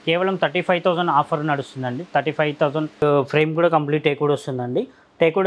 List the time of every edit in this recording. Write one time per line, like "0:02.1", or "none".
0:03.0